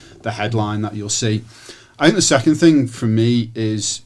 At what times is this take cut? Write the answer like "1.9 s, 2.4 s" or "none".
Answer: none